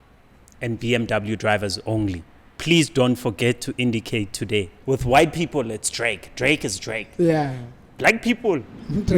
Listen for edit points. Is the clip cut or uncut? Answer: cut